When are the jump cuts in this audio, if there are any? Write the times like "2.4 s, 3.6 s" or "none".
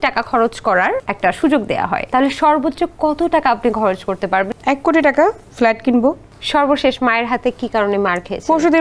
1.1 s, 2.0 s, 4.5 s, 5.5 s, 6.3 s